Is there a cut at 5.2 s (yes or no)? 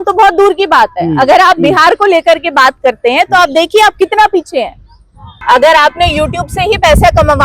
yes